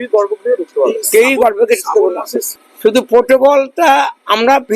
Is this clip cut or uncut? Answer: cut